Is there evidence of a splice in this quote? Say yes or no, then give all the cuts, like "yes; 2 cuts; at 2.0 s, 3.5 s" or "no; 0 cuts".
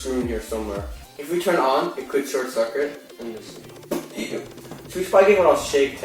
no; 0 cuts